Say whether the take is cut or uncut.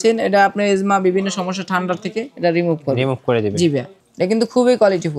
cut